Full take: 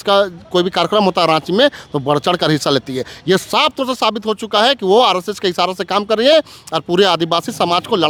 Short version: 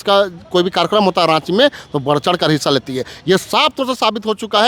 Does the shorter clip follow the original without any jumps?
yes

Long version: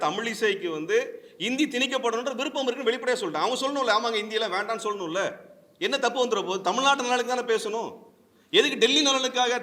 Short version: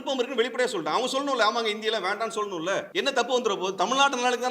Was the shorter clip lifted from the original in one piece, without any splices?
no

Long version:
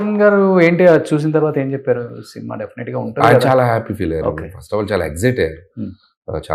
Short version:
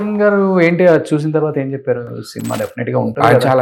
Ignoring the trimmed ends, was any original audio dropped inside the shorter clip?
no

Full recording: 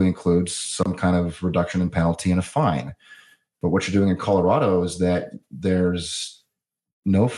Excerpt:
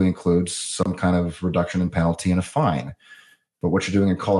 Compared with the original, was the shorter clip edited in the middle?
no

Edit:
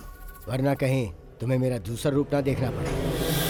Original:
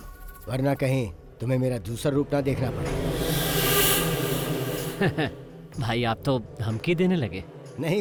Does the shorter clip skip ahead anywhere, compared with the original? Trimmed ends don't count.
no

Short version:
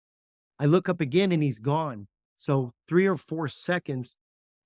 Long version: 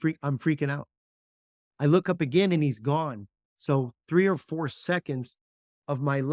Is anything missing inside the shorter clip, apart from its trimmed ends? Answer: no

